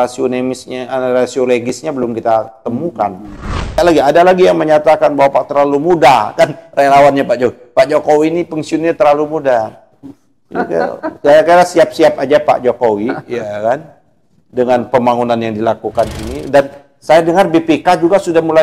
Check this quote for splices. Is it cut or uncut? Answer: cut